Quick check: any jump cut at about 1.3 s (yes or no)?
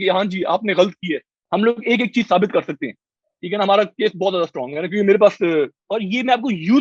yes